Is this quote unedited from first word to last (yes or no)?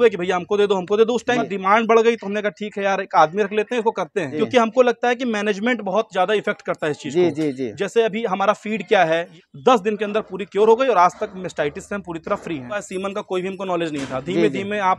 no